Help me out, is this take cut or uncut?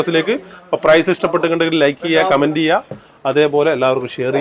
uncut